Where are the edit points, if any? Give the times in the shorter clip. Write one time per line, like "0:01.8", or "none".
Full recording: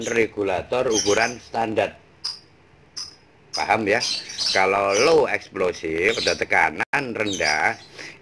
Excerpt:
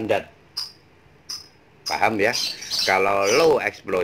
none